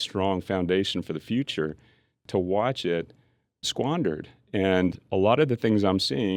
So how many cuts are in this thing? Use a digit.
2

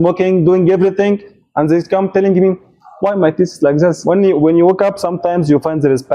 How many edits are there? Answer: 1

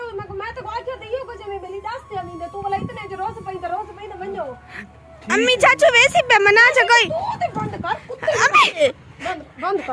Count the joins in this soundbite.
1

